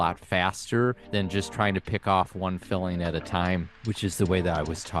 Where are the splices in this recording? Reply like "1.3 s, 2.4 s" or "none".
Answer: 1.0 s, 3.8 s